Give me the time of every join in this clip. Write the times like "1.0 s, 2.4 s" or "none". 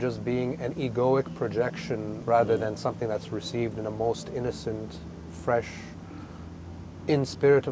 2.1 s